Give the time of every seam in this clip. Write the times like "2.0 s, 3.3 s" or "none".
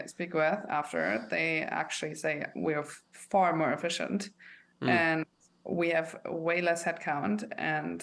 none